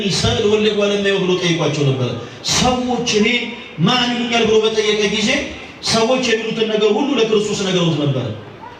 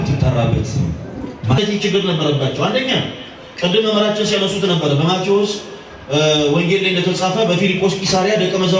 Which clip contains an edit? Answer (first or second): second